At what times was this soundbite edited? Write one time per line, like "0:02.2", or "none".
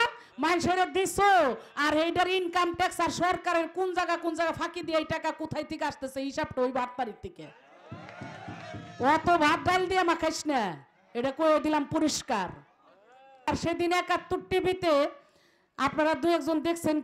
0:13.5